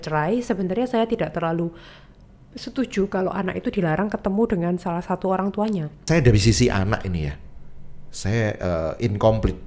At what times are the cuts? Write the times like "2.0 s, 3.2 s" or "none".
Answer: 6.1 s